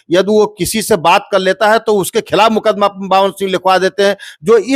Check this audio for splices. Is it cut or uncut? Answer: uncut